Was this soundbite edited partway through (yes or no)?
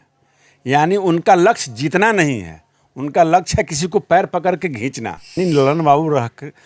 yes